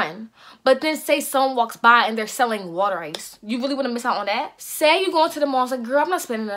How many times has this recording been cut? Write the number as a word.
one